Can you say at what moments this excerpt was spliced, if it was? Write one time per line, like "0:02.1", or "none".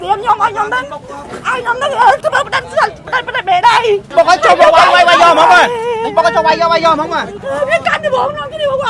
0:02.2
0:04.1
0:07.3